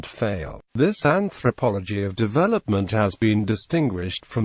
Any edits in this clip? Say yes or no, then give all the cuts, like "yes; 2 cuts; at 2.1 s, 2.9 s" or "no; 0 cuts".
yes; 1 cut; at 3.1 s